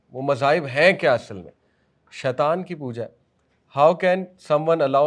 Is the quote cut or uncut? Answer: uncut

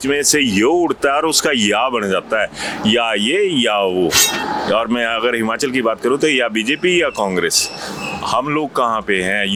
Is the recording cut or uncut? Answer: uncut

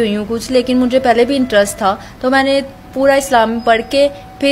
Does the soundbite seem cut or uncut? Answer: uncut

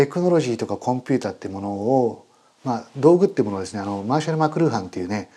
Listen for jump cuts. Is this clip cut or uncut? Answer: uncut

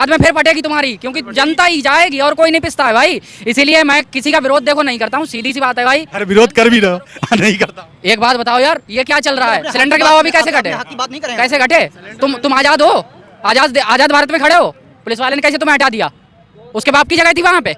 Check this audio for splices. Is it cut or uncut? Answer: uncut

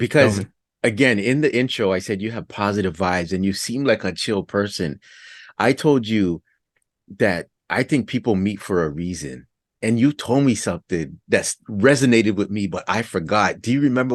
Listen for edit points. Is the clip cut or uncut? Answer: uncut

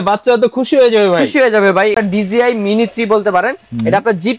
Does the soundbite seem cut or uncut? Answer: cut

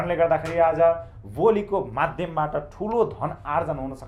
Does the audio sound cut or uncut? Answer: uncut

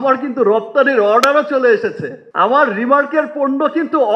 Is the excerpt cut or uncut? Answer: uncut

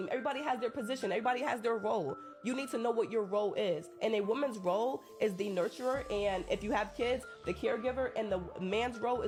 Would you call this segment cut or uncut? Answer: uncut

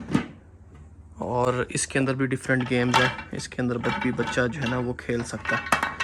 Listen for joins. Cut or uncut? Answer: uncut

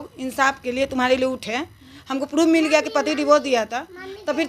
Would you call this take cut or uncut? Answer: uncut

